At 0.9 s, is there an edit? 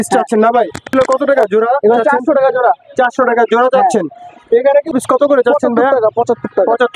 yes; 3 cuts; at 0.9 s, 4.1 s, 4.9 s

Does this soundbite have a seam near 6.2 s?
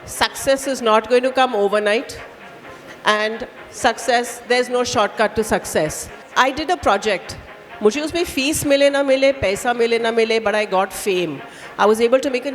yes; 1 cut; at 6.2 s

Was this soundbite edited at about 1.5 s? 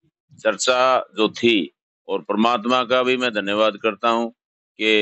no; 0 cuts

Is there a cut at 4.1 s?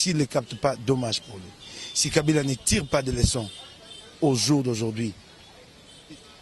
no; 1 cut; at 1.7 s

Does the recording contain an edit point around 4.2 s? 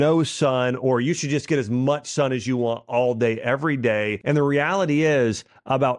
yes; 1 cut; at 4.2 s

